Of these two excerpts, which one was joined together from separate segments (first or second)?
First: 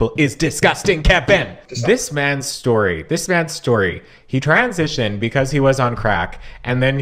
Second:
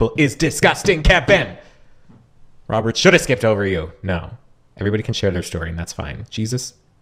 first